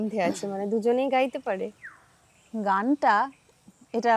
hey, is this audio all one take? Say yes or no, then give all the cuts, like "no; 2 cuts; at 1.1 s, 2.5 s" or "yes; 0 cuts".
yes; 0 cuts